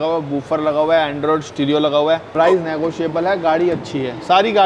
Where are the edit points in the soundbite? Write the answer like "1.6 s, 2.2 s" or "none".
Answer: 2.3 s